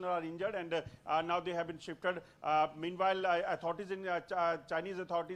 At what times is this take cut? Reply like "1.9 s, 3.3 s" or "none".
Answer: none

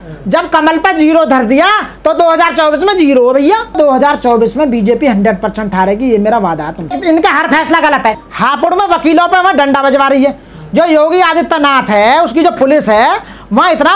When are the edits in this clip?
3.7 s, 7.0 s, 8.3 s

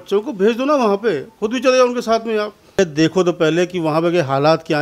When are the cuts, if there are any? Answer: 2.8 s

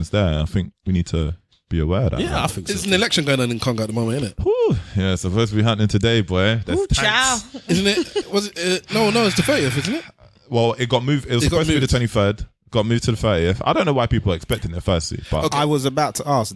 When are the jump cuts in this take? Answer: none

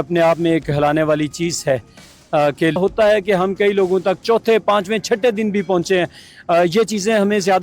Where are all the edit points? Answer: 2.8 s

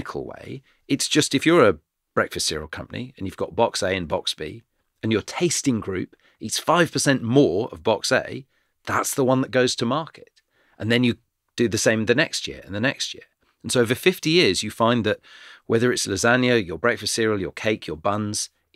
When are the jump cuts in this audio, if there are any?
none

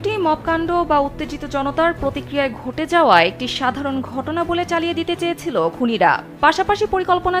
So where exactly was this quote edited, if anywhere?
none

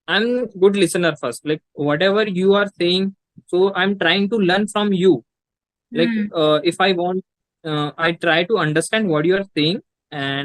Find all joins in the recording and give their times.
none

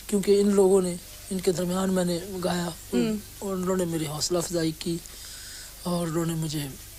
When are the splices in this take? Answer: none

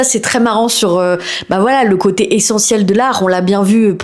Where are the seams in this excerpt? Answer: none

